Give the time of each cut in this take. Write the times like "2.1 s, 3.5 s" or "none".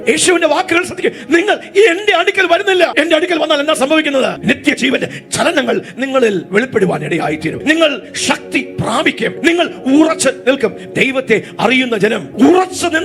2.9 s, 4.4 s